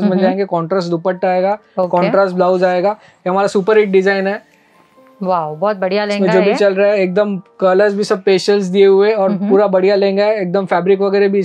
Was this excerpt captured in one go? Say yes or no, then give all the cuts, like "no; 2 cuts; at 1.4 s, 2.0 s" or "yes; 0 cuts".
yes; 0 cuts